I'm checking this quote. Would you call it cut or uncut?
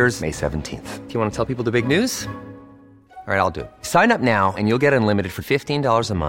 uncut